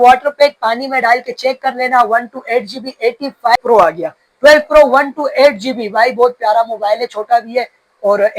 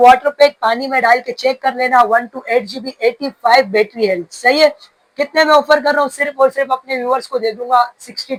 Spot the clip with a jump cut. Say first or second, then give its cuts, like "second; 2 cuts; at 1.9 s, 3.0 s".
first; 1 cut; at 3.6 s